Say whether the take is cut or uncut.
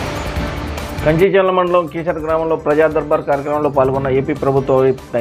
cut